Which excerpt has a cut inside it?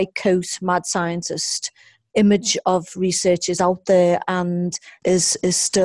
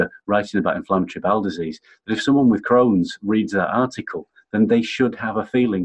first; 1 cut; at 4.9 s

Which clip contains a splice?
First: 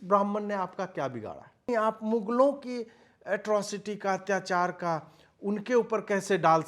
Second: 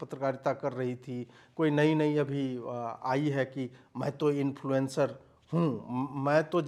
first; 1 cut; at 1.7 s

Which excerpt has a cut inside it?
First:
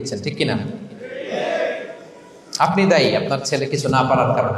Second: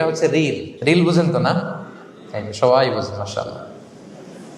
second; 1 cut; at 0.9 s

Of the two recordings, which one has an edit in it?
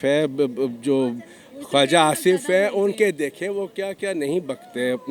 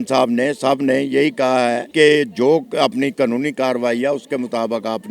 second; 1 cut; at 1.8 s

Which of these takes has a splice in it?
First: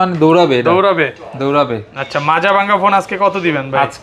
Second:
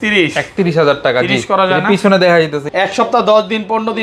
second; 1 cut; at 2.7 s

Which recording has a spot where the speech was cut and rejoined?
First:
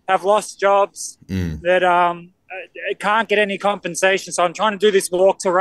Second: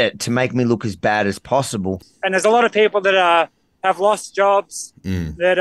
second; 1 cut; at 2.0 s

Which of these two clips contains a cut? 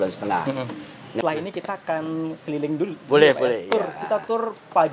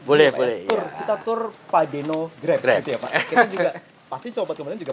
first; 1 cut; at 1.2 s

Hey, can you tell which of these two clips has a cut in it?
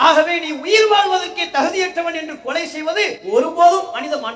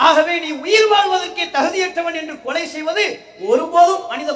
first; 1 cut; at 3.2 s

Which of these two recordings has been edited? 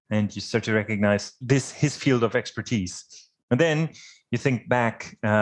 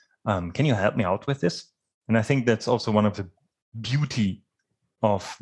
first; 1 cut; at 1.4 s

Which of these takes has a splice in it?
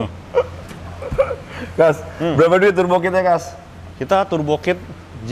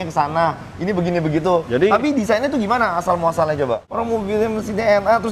second; 2 cuts; at 1.7 s, 3.9 s

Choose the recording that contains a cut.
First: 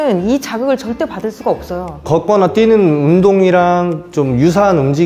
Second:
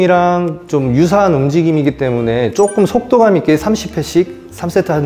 first; 1 cut; at 2.1 s

